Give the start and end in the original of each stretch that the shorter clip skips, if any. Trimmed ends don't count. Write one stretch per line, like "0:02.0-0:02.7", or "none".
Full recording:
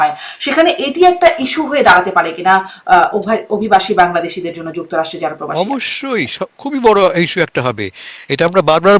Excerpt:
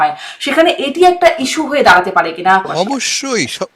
0:02.7-0:05.5